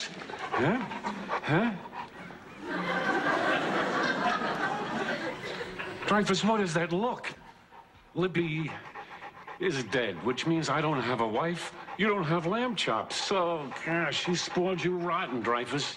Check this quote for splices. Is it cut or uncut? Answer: cut